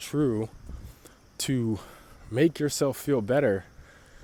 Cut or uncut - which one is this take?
uncut